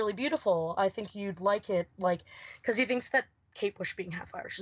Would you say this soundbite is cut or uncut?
uncut